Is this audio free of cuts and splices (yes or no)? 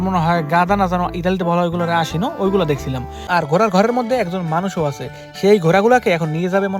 no